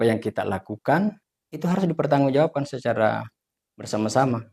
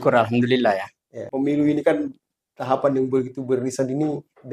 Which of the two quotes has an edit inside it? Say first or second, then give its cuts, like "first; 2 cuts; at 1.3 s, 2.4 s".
second; 1 cut; at 1.3 s